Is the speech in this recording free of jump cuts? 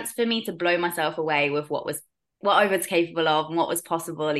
yes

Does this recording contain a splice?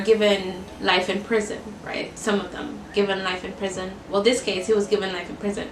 no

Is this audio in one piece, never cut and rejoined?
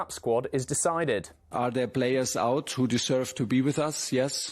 no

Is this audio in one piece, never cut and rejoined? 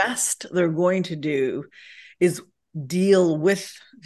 yes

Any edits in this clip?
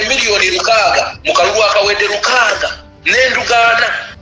no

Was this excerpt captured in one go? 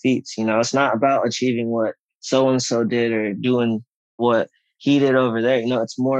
no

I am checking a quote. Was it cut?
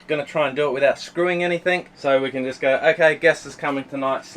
yes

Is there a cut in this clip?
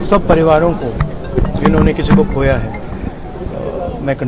no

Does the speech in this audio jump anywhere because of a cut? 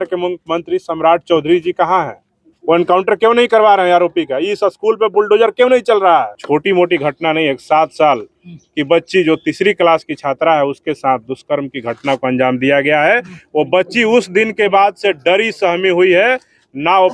yes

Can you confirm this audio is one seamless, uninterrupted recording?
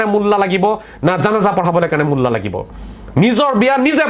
yes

